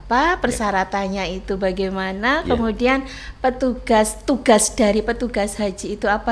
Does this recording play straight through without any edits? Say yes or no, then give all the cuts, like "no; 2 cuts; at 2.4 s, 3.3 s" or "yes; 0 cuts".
yes; 0 cuts